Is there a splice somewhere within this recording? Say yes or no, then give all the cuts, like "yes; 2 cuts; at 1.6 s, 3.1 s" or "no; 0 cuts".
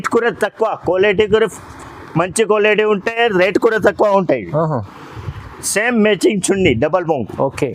no; 0 cuts